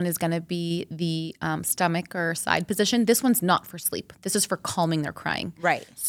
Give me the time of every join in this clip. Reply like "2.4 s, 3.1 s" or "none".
none

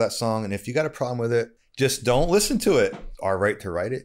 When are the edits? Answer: 1.6 s, 3.0 s

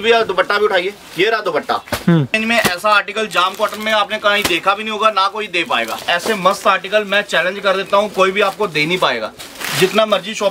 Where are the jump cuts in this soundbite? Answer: 2.3 s, 6.0 s

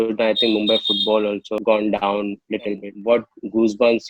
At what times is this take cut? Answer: 2.9 s

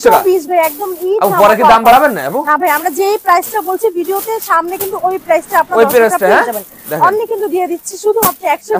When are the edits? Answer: none

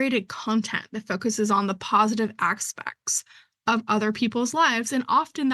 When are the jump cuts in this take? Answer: none

